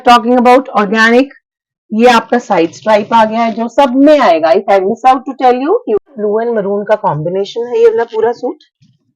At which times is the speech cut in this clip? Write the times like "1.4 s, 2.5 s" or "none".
6.0 s